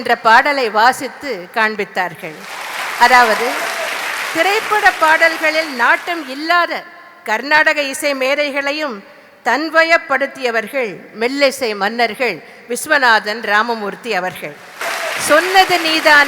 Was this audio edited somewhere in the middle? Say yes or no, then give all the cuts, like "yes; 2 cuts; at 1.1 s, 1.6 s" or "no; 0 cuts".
yes; 1 cut; at 14.8 s